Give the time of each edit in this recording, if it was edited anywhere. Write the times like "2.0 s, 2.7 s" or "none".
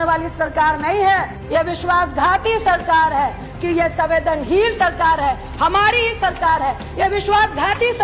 1.4 s, 3.5 s